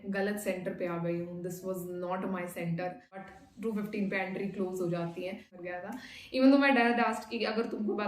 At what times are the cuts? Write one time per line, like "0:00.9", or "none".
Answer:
0:03.4
0:05.8